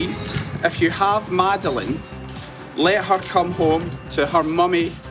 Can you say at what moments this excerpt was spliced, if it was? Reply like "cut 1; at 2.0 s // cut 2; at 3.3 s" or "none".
none